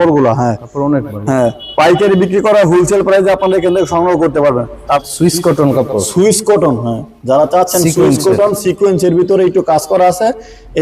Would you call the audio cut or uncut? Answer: cut